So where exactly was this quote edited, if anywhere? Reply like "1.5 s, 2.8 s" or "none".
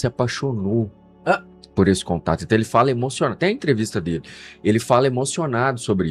none